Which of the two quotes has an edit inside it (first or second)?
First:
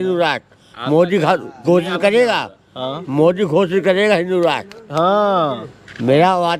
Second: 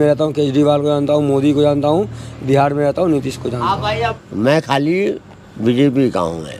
second